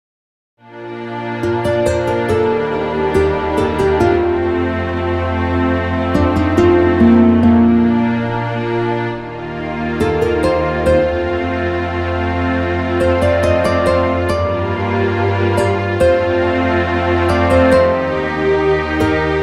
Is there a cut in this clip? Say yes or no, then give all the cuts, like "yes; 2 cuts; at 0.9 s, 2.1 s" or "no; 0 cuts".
yes; 1 cut; at 12.3 s